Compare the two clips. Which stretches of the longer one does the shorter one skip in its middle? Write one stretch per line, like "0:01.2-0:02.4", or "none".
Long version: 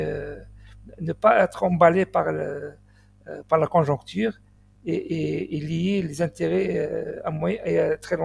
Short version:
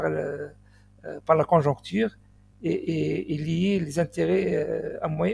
none